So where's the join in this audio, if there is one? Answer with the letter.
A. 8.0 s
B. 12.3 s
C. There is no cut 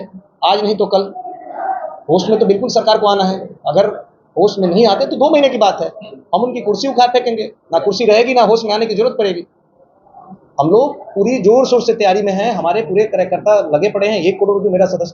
C